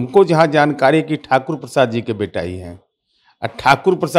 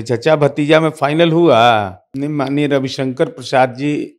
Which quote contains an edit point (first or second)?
second